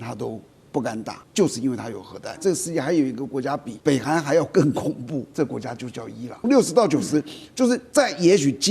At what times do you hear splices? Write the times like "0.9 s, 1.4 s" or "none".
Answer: 1.2 s, 2.4 s, 3.7 s, 5.3 s, 6.4 s